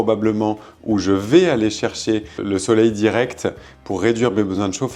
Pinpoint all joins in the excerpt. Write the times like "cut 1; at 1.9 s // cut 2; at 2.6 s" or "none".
cut 1; at 2.4 s